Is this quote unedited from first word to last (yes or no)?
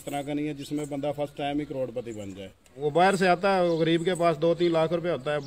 no